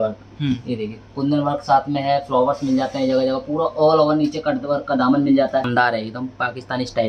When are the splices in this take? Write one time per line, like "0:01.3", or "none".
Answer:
0:05.7